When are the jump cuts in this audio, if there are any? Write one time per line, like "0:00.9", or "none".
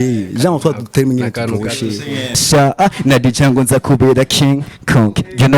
0:02.4